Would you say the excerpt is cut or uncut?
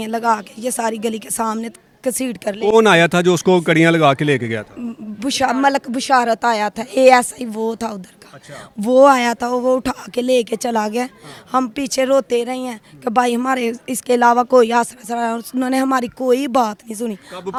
uncut